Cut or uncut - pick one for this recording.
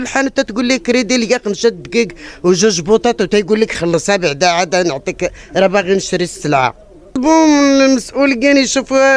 cut